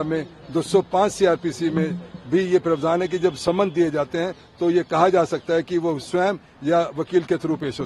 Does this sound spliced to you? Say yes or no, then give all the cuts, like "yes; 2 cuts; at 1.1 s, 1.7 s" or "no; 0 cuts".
no; 0 cuts